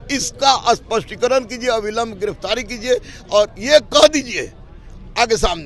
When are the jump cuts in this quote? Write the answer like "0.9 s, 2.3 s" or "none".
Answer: none